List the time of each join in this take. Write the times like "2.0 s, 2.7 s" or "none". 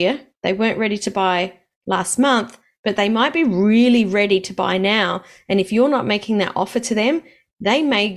none